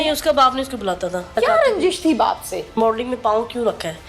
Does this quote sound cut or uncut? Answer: cut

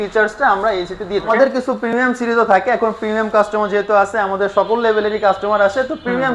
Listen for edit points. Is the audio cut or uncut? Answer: cut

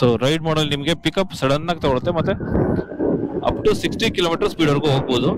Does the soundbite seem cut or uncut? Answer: uncut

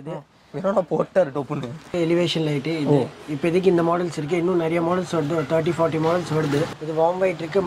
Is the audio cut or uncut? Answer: cut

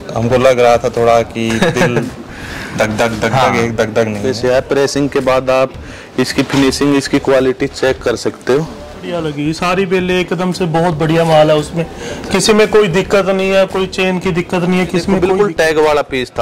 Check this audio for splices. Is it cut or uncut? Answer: cut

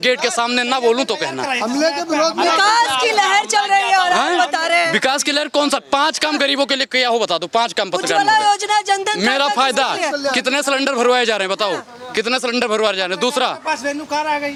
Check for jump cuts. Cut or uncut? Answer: uncut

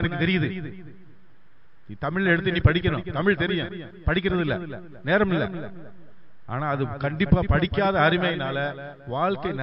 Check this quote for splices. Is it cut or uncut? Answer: uncut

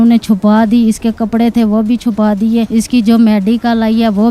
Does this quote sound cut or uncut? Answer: cut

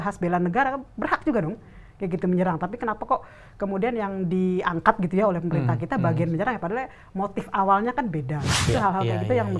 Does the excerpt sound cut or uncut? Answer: cut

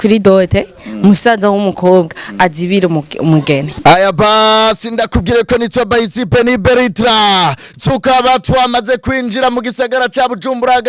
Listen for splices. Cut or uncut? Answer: cut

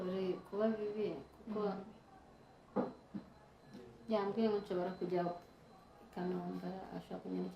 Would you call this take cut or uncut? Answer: uncut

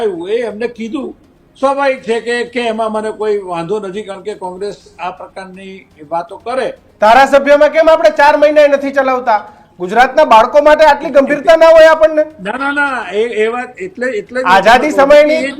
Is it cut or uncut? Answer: cut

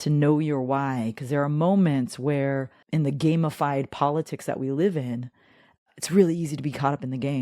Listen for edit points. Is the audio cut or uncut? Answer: cut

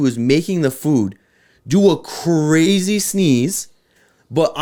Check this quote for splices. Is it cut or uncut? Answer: uncut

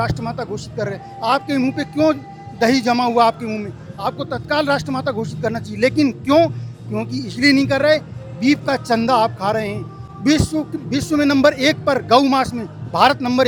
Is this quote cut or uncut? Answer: uncut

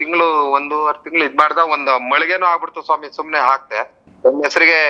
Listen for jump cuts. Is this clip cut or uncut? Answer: cut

